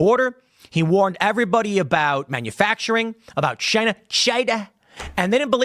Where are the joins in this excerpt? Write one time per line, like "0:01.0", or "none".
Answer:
none